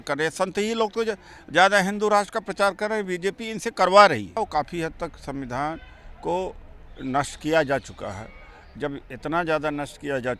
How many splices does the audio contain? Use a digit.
1